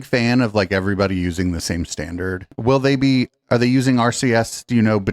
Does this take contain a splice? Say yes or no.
yes